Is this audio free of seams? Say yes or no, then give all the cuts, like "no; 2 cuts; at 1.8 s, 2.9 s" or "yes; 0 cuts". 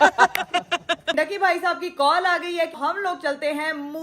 no; 2 cuts; at 1.1 s, 2.8 s